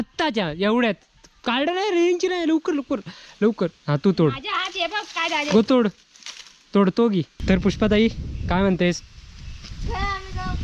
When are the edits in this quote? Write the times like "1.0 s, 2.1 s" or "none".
7.3 s